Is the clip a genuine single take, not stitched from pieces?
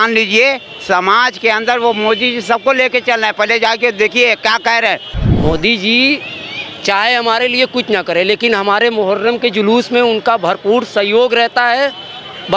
no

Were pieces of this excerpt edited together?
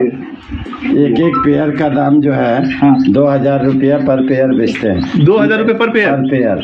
no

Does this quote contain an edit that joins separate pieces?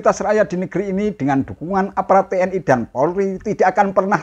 no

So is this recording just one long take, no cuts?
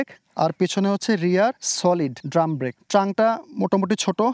no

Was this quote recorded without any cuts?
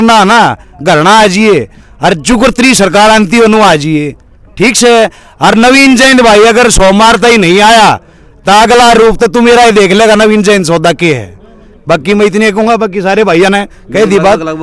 yes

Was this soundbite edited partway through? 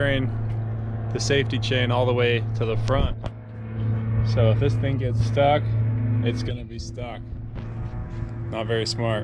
no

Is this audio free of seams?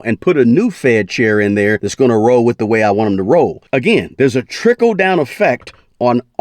no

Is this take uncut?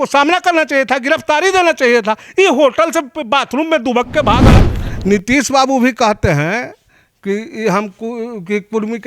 no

